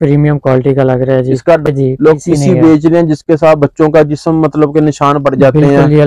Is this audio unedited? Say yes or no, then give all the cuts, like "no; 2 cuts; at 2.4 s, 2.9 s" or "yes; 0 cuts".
no; 1 cut; at 1.7 s